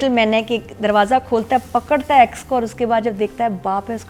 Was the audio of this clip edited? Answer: no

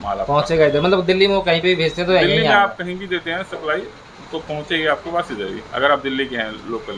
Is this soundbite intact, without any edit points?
yes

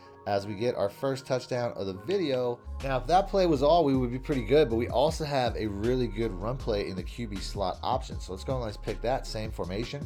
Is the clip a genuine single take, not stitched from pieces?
yes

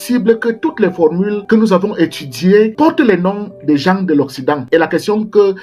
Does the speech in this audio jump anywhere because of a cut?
yes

